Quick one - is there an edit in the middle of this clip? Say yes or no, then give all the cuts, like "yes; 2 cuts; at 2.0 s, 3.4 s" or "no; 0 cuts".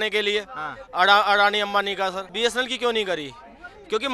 yes; 1 cut; at 2.3 s